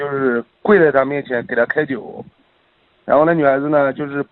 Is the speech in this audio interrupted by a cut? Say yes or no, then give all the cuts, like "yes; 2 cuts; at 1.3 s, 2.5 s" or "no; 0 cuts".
no; 0 cuts